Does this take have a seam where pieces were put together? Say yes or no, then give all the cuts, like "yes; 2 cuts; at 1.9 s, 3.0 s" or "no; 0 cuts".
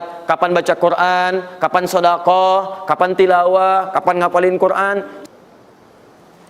yes; 1 cut; at 5.1 s